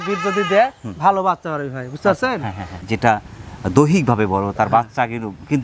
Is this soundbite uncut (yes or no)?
no